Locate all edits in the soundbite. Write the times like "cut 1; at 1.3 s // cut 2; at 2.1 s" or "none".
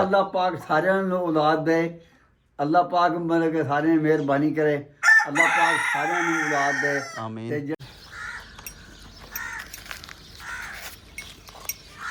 cut 1; at 7.8 s